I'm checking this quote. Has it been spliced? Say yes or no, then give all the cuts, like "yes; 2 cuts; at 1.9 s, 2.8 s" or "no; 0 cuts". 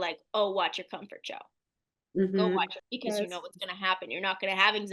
yes; 1 cut; at 2.8 s